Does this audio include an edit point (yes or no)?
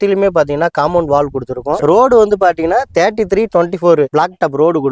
yes